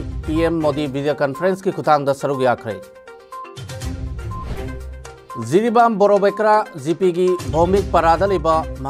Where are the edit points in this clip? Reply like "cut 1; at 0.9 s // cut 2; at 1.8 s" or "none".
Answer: cut 1; at 2.8 s